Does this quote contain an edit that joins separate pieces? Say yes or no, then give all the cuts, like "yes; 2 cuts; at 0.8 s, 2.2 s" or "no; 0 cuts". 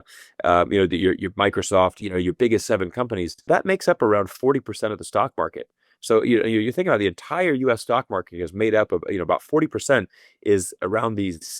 yes; 2 cuts; at 2.0 s, 3.5 s